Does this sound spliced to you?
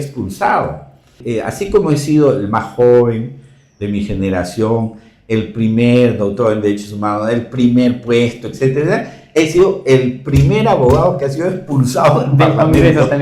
yes; 1 cut; at 1.2 s

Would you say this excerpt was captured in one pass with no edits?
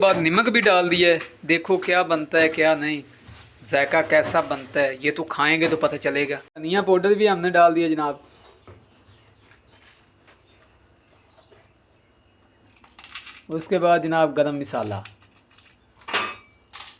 yes; 0 cuts

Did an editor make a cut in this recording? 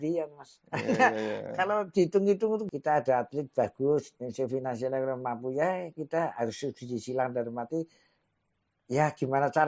yes; 1 cut; at 2.7 s

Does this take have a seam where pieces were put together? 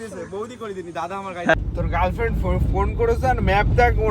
yes; 1 cut; at 1.5 s

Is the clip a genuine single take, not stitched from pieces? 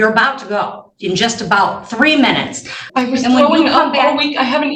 no; 1 cut; at 2.8 s

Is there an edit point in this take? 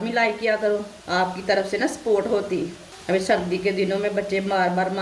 yes; 2 cuts; at 0.9 s, 2.9 s

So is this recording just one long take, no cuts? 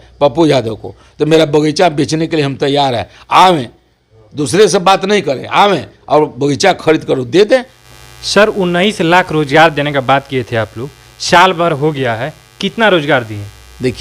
no; 1 cut; at 7.8 s

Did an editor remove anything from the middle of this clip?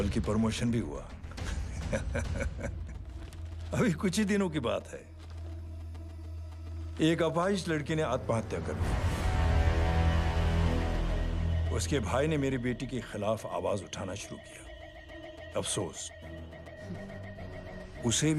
no; 0 cuts

